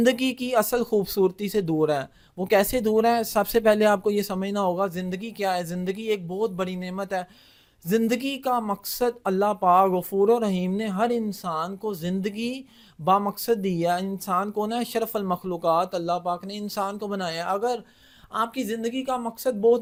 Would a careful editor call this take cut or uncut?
uncut